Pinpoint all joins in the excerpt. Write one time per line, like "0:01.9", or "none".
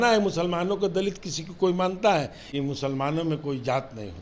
0:02.4